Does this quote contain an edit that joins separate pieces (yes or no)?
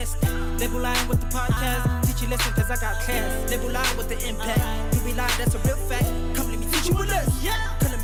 no